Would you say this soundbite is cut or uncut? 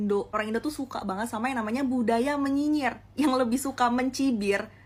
uncut